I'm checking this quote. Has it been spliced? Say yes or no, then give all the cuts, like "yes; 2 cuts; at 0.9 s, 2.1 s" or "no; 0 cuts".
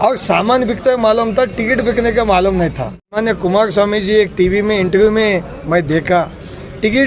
yes; 1 cut; at 3.2 s